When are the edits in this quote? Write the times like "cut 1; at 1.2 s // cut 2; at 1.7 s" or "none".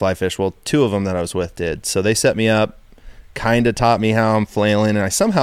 none